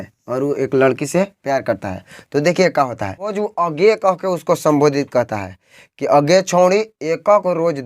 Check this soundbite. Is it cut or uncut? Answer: cut